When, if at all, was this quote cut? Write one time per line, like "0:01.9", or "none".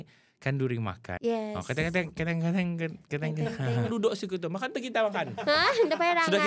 0:01.1
0:03.9